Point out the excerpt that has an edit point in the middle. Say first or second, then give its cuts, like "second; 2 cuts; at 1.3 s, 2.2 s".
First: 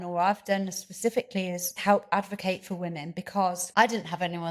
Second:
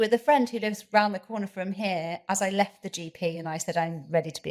first; 2 cuts; at 1.8 s, 3.6 s